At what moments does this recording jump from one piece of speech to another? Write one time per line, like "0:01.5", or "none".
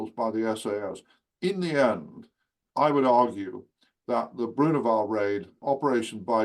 0:05.5